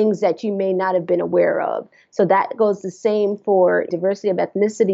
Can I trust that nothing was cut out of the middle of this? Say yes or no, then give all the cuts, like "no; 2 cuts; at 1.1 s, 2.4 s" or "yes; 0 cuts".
no; 1 cut; at 3.9 s